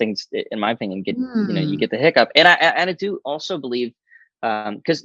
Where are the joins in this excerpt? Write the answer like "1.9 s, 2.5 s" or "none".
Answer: none